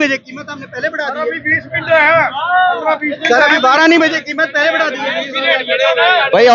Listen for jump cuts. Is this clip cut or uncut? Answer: uncut